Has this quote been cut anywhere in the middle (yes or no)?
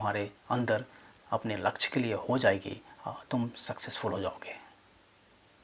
no